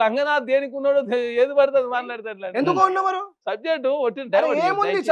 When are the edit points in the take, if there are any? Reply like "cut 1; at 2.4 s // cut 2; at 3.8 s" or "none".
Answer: cut 1; at 3.4 s

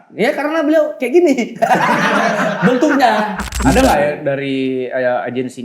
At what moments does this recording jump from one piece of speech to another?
cut 1; at 3.4 s

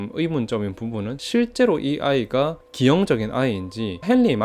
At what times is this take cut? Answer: cut 1; at 1.2 s

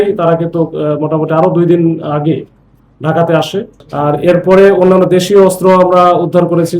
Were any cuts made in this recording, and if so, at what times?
cut 1; at 3.7 s

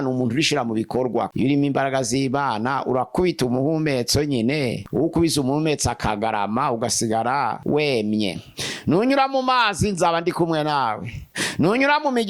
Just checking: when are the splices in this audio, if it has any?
cut 1; at 1.3 s // cut 2; at 8.5 s

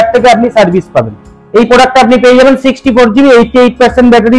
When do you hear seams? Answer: none

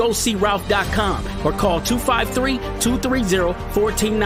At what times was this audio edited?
none

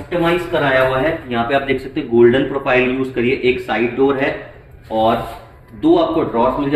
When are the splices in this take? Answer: none

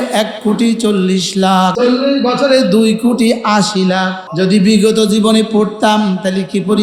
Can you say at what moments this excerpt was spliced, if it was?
cut 1; at 1.7 s // cut 2; at 4.2 s

